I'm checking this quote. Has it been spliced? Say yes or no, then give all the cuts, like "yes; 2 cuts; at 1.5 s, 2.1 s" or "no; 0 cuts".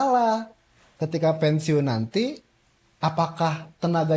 no; 0 cuts